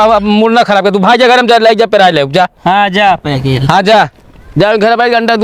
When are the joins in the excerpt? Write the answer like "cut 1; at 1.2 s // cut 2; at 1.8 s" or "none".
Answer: none